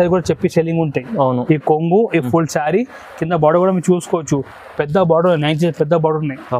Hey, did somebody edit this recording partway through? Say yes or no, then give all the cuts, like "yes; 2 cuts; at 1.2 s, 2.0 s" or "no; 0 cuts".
no; 0 cuts